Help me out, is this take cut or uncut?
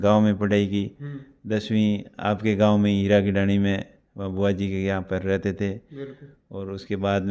uncut